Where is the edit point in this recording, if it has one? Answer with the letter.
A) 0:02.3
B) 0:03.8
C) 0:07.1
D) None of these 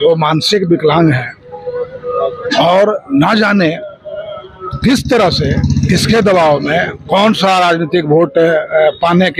D